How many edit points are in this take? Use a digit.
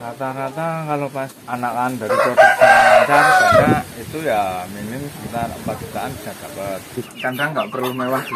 2